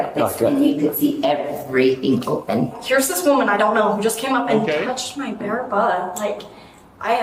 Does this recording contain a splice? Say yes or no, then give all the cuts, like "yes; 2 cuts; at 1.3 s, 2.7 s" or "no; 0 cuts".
yes; 1 cut; at 2.8 s